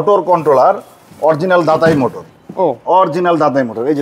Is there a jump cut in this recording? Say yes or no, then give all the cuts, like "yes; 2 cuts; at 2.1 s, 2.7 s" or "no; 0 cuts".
no; 0 cuts